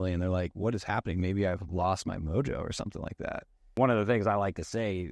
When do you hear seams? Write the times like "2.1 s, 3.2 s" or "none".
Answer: 3.7 s